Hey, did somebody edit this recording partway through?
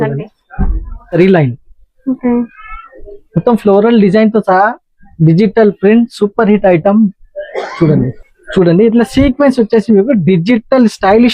yes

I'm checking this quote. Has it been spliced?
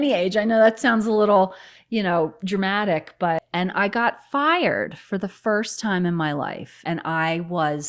yes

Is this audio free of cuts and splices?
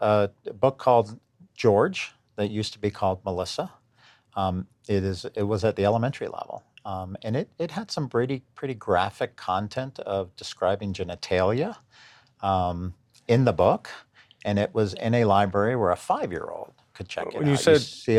yes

